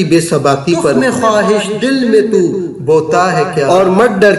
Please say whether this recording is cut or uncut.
cut